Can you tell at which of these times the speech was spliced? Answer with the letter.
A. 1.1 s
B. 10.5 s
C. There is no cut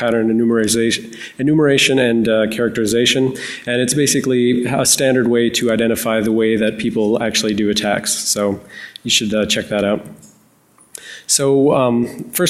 A